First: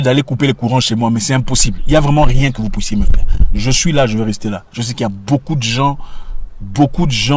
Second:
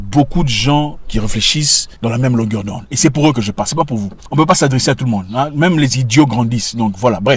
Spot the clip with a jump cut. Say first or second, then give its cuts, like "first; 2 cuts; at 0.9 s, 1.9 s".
second; 2 cuts; at 1.8 s, 4.2 s